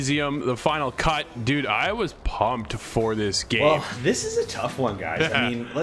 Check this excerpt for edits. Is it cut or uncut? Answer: cut